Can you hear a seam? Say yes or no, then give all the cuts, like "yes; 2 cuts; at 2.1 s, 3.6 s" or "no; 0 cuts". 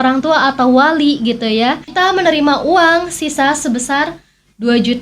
yes; 1 cut; at 1.9 s